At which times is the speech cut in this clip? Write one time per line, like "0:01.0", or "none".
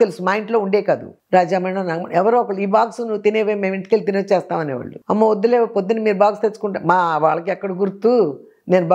0:01.1